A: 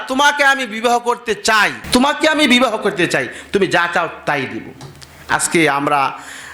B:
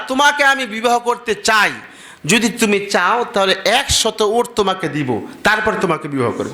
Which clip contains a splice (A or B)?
B